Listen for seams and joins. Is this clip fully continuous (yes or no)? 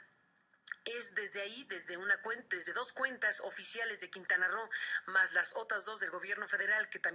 yes